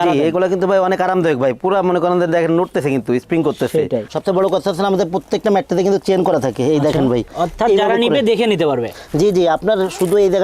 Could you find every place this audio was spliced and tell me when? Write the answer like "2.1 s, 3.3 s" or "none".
4.1 s, 7.3 s